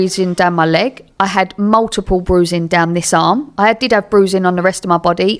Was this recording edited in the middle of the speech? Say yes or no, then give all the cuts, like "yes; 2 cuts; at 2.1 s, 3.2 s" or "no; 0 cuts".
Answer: no; 0 cuts